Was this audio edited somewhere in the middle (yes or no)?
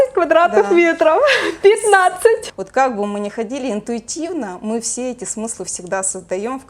yes